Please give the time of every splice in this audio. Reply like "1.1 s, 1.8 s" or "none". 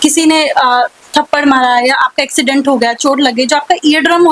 none